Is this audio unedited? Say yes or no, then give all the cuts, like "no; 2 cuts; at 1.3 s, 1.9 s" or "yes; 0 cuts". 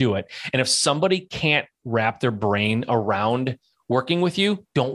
yes; 0 cuts